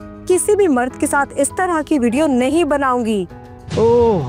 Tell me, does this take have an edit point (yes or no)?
no